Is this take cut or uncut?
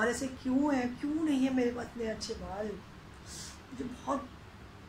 uncut